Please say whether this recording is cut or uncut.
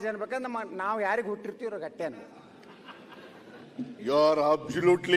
cut